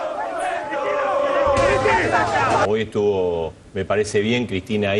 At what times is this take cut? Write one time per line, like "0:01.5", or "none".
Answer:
0:02.7